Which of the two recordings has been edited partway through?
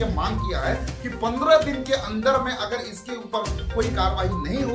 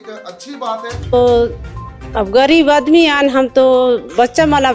second; 1 cut; at 1.1 s

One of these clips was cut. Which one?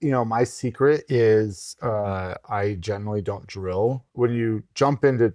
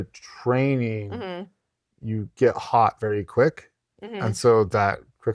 first; 1 cut; at 4.0 s

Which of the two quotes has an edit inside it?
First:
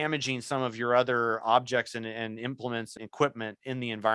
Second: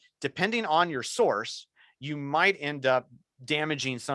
first; 1 cut; at 3.0 s

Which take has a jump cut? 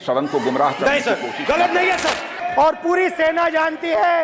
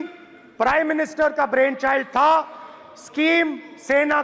first; 1 cut; at 2.3 s

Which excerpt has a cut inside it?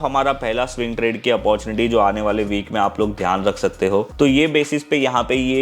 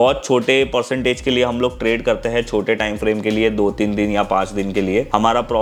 first; 1 cut; at 4.1 s

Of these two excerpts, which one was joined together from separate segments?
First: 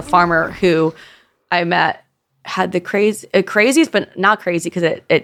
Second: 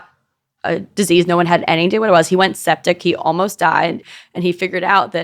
second; 1 cut; at 4.1 s

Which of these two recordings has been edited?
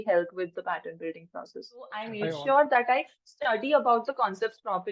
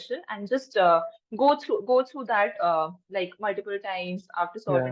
first; 1 cut; at 2.1 s

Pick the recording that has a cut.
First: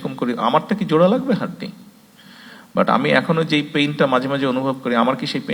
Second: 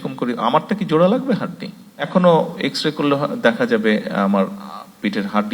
second; 1 cut; at 2.1 s

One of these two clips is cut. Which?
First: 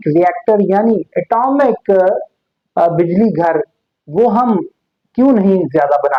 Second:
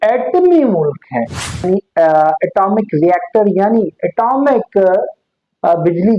second; 1 cut; at 1.7 s

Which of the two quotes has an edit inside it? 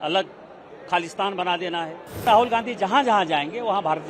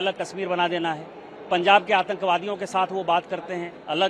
first; 1 cut; at 2.2 s

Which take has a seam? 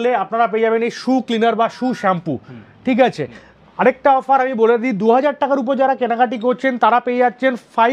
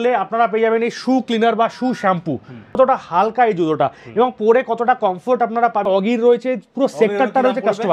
second; 2 cuts; at 2.8 s, 5.9 s

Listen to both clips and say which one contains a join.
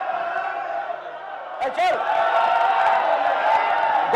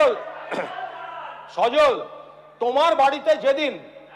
first; 1 cut; at 1.5 s

